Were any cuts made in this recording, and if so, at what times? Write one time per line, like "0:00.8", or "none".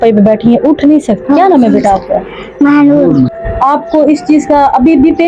0:01.2
0:03.4